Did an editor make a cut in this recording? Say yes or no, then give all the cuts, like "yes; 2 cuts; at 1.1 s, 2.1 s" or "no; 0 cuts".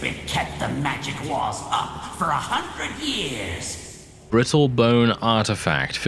yes; 1 cut; at 4.2 s